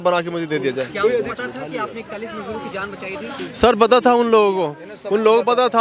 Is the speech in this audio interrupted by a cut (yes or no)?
no